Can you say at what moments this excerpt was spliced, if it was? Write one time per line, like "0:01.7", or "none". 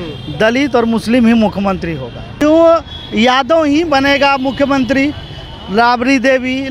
0:02.4